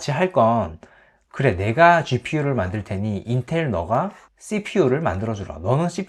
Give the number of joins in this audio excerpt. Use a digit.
0